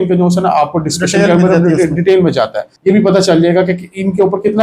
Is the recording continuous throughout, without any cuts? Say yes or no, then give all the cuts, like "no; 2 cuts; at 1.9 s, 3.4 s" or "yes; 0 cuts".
no; 1 cut; at 2.7 s